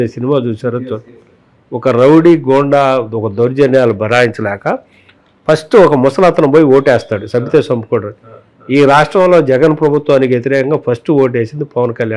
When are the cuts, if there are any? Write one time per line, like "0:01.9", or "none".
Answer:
none